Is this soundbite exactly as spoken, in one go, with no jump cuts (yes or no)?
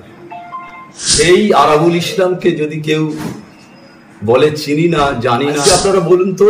no